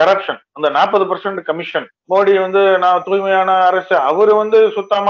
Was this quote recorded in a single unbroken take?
no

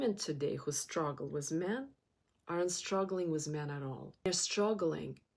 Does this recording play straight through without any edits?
no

